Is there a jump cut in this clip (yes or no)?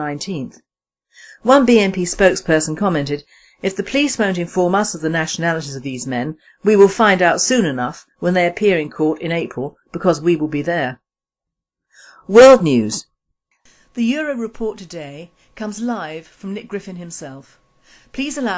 yes